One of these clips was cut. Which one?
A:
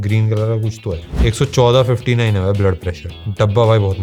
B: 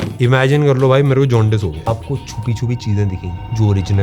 B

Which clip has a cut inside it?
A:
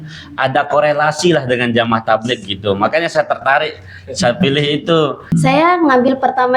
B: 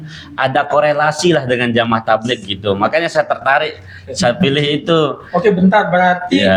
A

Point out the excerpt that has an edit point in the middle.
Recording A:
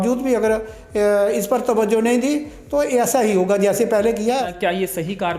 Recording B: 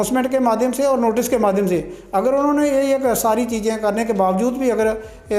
A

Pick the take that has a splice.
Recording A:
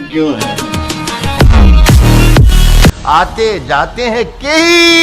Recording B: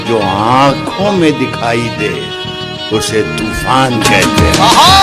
A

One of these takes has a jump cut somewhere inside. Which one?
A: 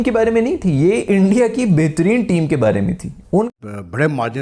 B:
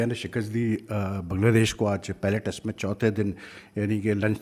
A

